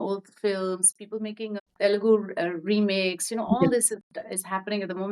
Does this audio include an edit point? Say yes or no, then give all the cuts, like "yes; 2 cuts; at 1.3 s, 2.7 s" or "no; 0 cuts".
yes; 1 cut; at 1.6 s